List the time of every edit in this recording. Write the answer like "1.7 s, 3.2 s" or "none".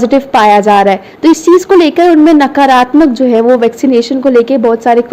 none